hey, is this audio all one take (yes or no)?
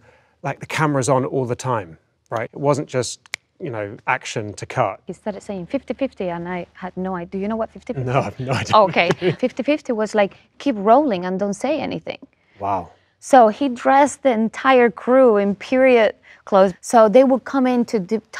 no